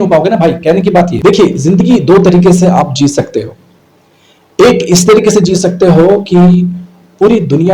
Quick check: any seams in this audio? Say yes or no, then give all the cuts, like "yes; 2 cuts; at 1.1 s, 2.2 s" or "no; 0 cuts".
yes; 1 cut; at 1.1 s